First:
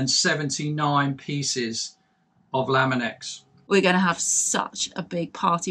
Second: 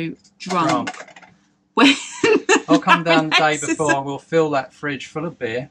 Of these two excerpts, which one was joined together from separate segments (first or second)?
first